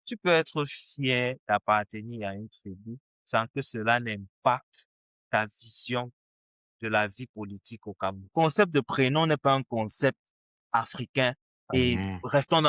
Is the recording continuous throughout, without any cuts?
no; 1 cut; at 8.3 s

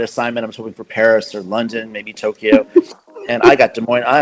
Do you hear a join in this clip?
no; 0 cuts

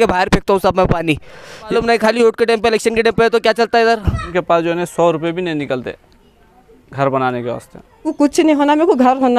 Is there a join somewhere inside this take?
yes; 3 cuts; at 1.7 s, 4.2 s, 8.1 s

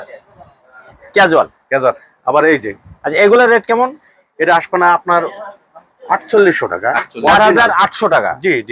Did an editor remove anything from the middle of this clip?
no; 0 cuts

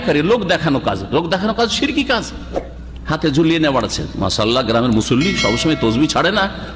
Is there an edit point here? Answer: no; 0 cuts

